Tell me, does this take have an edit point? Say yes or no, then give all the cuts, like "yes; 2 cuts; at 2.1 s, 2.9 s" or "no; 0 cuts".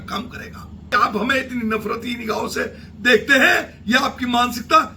yes; 1 cut; at 0.9 s